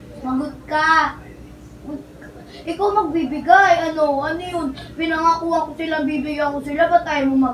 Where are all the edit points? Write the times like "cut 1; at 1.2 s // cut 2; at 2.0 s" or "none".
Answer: cut 1; at 4.4 s